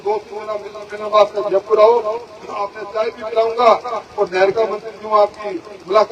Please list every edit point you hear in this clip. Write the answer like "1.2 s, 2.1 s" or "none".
none